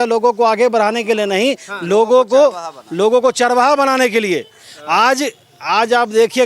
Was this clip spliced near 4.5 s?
no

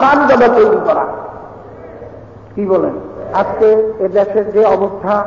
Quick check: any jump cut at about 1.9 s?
no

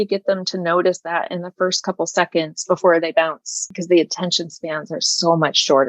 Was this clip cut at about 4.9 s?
no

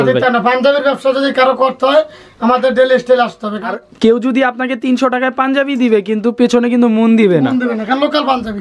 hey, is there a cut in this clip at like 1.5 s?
no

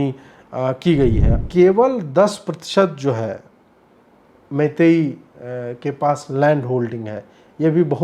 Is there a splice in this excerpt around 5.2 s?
no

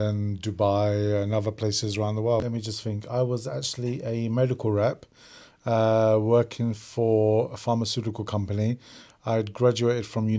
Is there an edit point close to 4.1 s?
no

